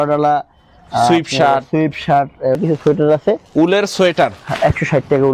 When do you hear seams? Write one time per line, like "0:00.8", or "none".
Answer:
0:02.6